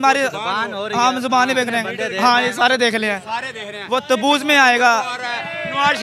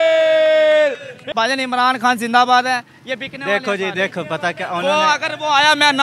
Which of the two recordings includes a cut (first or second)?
second